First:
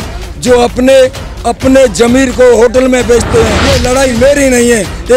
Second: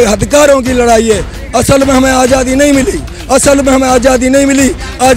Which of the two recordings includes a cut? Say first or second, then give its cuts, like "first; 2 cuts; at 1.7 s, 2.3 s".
first; 1 cut; at 3.6 s